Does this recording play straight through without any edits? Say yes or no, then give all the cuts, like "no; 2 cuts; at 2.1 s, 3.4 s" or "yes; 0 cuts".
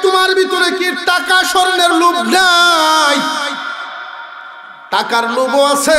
yes; 0 cuts